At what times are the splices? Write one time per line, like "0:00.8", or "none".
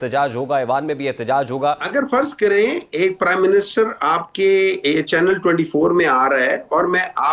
0:01.8